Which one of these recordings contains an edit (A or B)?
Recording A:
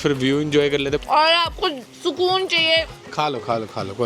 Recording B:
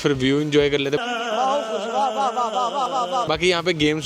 A